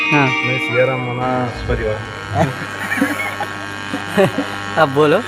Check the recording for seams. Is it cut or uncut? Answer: uncut